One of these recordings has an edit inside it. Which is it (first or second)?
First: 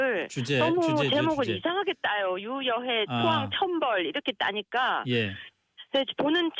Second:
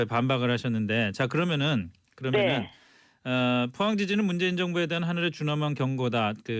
first